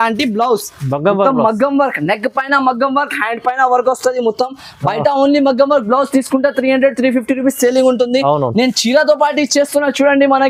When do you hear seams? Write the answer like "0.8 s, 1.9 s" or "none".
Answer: none